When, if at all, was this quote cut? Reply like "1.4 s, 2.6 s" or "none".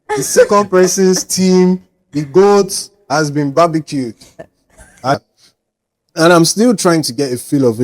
5.1 s